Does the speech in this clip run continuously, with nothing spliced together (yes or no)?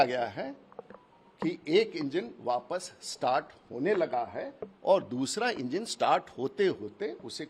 yes